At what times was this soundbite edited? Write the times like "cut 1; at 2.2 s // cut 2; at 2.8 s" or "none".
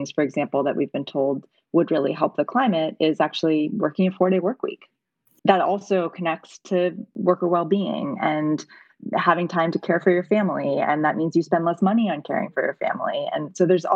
cut 1; at 5.4 s // cut 2; at 7.1 s